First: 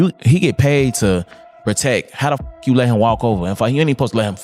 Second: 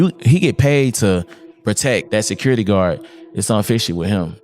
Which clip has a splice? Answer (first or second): second